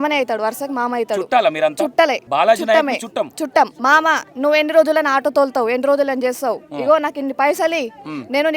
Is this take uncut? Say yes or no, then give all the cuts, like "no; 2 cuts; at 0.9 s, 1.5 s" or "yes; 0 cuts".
no; 2 cuts; at 2.2 s, 3.8 s